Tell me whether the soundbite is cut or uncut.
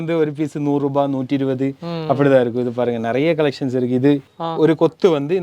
cut